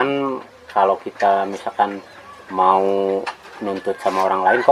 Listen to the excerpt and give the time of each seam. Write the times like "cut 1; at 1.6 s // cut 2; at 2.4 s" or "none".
none